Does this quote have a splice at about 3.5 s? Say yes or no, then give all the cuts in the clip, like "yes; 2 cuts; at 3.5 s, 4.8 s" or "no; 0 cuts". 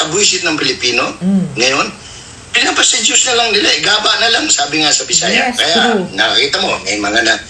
no; 1 cut; at 5.3 s